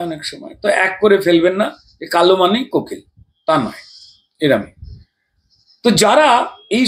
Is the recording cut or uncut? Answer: uncut